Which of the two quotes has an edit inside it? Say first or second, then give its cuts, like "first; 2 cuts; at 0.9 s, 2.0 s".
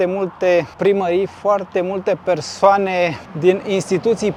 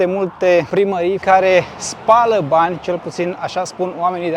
second; 1 cut; at 1.0 s